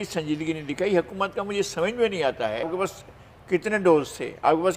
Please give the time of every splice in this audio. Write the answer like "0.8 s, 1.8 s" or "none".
2.7 s

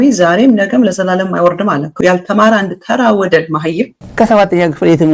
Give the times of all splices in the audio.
2.0 s, 3.9 s

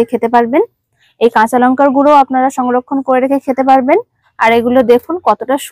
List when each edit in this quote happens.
1.0 s, 4.2 s

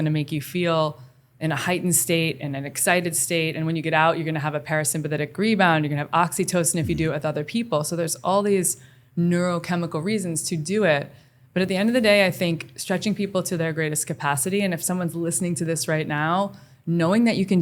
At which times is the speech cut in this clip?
none

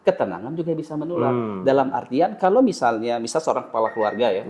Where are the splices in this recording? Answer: none

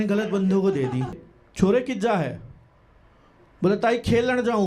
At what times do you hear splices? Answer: 1.2 s

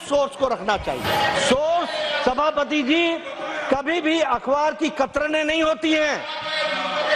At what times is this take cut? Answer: 1.0 s

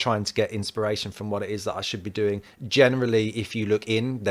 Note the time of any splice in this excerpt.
none

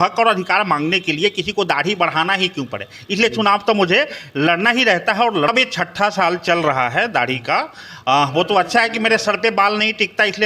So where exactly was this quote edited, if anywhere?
5.5 s

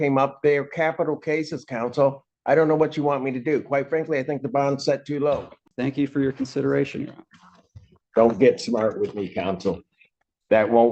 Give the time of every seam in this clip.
5.6 s

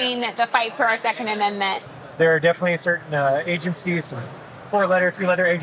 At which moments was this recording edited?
1.8 s

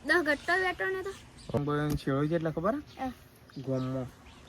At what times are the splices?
1.6 s

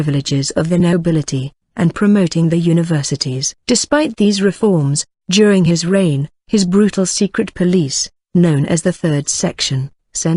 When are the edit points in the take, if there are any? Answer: none

